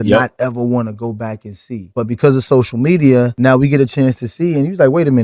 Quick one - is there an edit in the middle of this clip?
no; 0 cuts

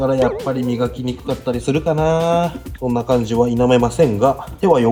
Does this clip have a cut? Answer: no; 0 cuts

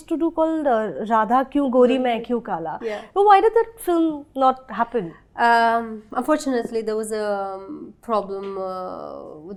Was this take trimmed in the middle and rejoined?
no; 0 cuts

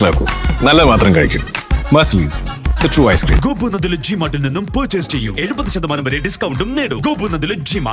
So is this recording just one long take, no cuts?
yes; 0 cuts

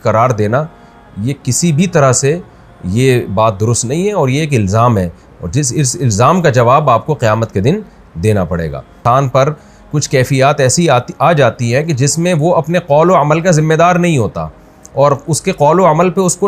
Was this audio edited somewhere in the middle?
yes; 1 cut; at 9.0 s

